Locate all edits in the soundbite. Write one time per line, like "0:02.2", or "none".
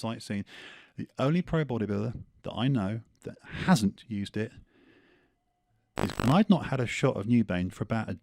0:06.1